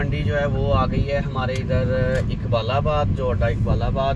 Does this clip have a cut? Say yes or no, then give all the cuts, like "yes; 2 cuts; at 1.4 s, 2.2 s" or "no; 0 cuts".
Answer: no; 0 cuts